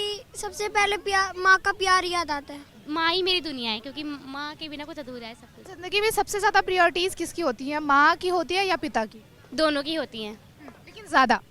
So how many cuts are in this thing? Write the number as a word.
two